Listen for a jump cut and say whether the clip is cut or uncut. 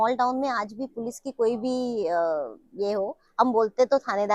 uncut